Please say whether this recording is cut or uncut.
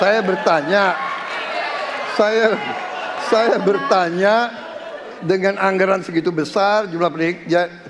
uncut